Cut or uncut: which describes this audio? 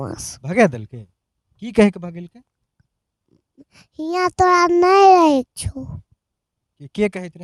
uncut